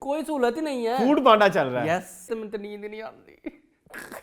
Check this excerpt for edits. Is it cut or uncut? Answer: cut